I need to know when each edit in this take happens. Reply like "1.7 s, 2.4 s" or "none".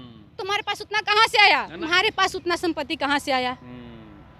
1.8 s